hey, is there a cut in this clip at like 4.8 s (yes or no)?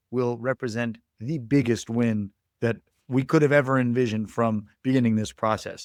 no